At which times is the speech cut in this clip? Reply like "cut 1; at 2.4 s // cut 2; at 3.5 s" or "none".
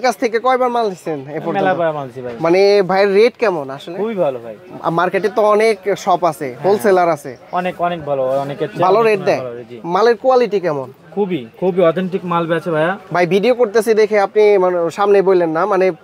none

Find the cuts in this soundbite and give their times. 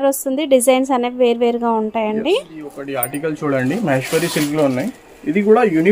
cut 1; at 3.1 s

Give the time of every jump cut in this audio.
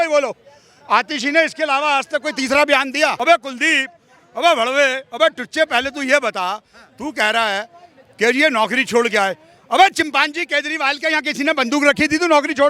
cut 1; at 3.2 s

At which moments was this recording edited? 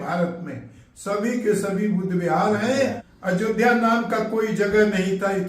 cut 1; at 3.1 s

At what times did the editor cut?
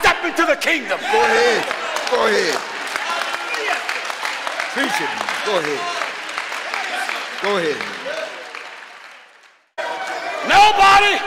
cut 1; at 9.8 s

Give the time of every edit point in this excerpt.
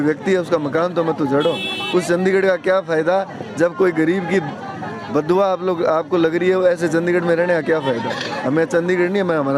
none

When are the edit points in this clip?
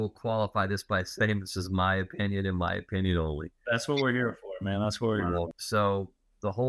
cut 1; at 5.6 s

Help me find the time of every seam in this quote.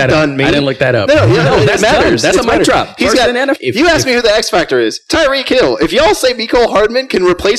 cut 1; at 3.6 s

